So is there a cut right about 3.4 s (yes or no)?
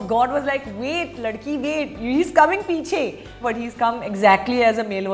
yes